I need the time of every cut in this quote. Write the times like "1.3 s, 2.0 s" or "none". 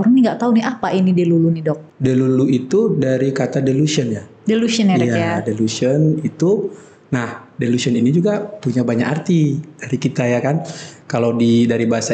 1.9 s